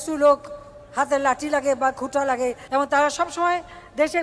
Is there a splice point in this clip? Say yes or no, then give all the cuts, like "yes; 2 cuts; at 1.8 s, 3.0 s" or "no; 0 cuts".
no; 0 cuts